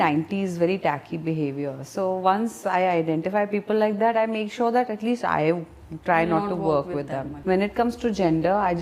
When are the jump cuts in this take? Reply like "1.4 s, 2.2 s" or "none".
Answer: 7.3 s